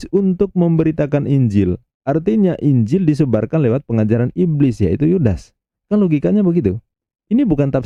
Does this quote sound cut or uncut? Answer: uncut